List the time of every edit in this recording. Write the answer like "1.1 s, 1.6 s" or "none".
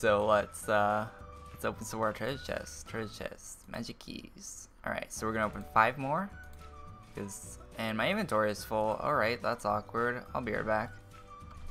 7.5 s

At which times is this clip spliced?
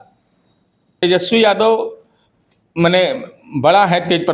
0.9 s

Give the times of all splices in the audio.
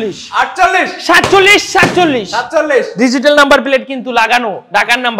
none

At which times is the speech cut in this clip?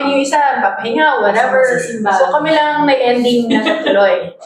none

